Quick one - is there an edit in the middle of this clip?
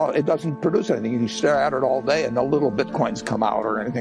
no; 0 cuts

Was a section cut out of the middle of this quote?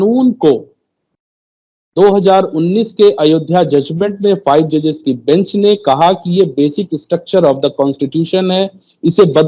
no; 0 cuts

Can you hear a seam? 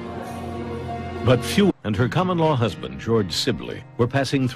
no; 0 cuts

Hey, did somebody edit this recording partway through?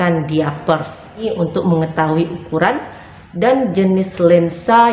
yes; 1 cut; at 1.3 s

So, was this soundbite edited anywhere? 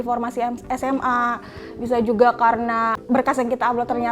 yes; 1 cut; at 3.0 s

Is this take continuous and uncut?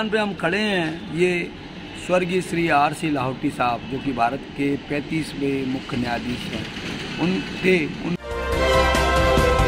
no; 1 cut; at 8.1 s

